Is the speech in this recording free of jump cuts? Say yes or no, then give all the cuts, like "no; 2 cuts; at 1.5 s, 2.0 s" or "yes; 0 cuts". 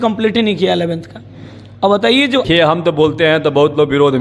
no; 1 cut; at 2.4 s